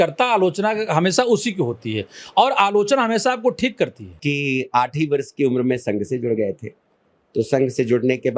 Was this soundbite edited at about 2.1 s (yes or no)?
no